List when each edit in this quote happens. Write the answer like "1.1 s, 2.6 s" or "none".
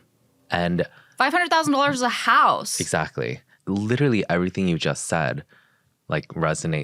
3.5 s